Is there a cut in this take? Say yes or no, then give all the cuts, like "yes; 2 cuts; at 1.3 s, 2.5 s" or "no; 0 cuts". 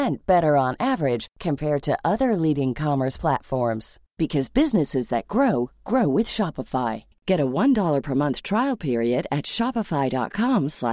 no; 0 cuts